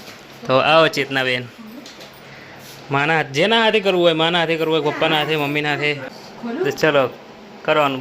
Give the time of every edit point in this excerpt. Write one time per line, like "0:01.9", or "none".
0:06.1